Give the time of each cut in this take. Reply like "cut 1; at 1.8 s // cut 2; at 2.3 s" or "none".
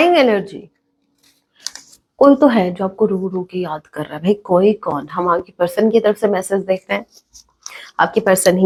none